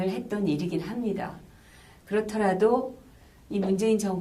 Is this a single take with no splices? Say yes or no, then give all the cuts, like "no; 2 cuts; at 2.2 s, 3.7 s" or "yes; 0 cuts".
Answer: no; 1 cut; at 0.9 s